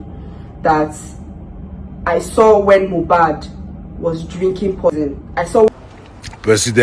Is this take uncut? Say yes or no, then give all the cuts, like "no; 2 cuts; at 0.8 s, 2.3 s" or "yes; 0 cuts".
no; 1 cut; at 5.7 s